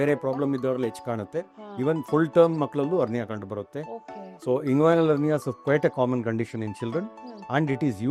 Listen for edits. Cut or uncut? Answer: uncut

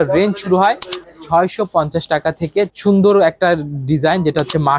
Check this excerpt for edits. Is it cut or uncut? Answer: cut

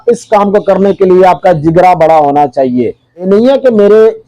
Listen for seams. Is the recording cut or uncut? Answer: cut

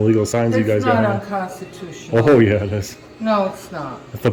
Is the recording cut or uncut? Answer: uncut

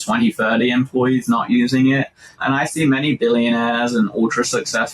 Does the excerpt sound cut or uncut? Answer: cut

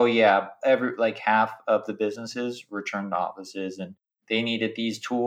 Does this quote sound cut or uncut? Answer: uncut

